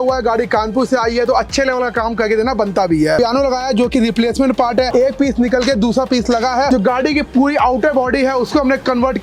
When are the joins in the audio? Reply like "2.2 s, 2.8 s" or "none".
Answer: 3.2 s, 6.7 s